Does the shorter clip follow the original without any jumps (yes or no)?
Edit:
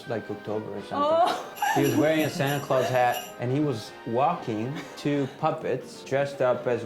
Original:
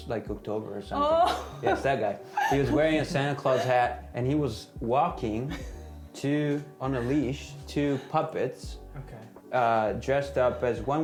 no